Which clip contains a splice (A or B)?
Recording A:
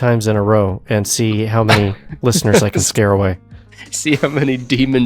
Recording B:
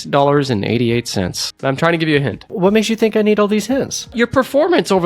B